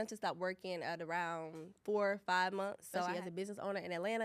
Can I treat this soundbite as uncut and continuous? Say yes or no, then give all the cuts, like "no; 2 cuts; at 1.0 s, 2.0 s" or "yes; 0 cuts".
no; 1 cut; at 3.1 s